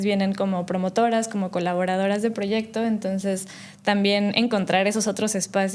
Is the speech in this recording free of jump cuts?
yes; 0 cuts

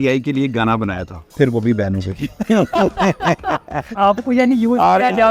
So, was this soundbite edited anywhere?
yes; 2 cuts; at 1.2 s, 3.9 s

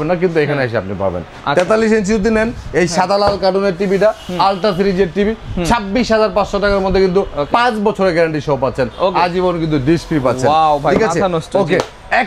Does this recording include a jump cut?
no; 0 cuts

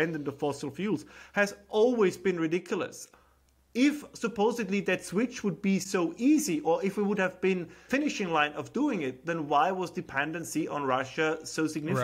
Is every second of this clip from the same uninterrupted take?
no; 2 cuts; at 3.0 s, 7.8 s

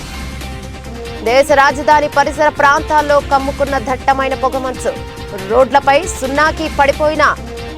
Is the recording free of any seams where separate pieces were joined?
yes; 0 cuts

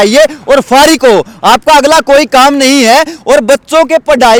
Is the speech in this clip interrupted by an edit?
no; 0 cuts

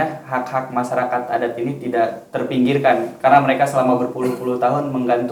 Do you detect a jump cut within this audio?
no; 0 cuts

